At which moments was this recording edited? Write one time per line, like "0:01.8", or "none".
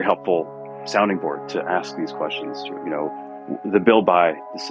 none